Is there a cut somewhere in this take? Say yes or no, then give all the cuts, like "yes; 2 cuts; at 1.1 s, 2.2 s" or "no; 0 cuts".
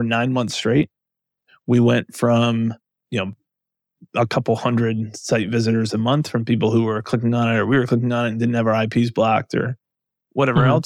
no; 0 cuts